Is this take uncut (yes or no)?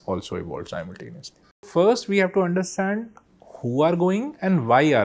no